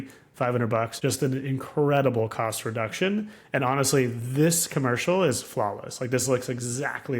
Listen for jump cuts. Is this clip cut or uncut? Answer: cut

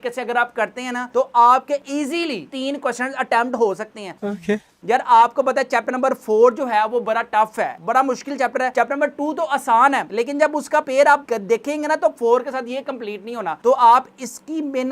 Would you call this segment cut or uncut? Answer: uncut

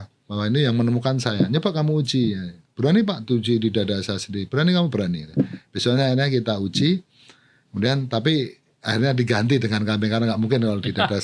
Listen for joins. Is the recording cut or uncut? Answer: uncut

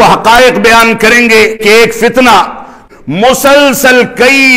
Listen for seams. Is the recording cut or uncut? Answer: cut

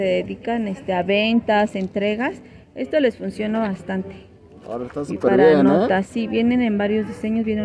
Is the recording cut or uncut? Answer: uncut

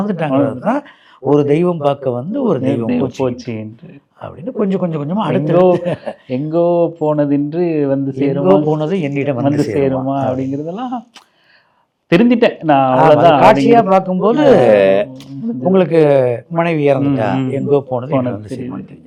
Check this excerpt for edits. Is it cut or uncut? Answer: uncut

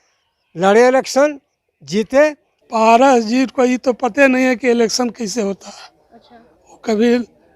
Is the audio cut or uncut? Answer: cut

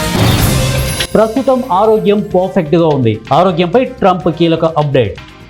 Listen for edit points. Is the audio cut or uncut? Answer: uncut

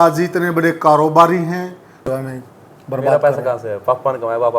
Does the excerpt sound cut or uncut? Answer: cut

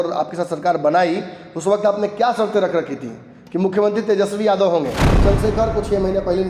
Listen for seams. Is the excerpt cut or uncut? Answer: cut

